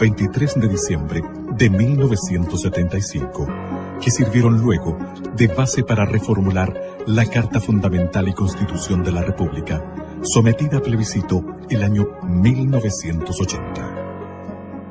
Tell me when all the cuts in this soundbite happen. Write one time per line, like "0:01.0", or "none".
none